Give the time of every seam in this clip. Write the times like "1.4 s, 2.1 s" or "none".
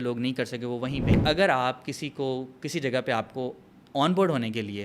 1.2 s